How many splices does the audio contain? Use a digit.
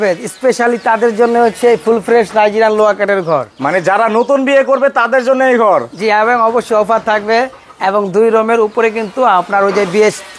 0